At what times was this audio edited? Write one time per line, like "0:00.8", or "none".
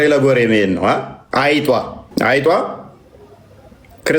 0:01.2
0:02.0